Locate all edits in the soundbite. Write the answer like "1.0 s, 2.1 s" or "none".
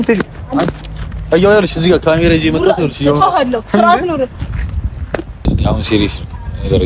5.4 s